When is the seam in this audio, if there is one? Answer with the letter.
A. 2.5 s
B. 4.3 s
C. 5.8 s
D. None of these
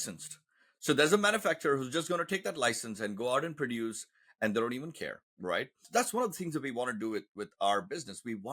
C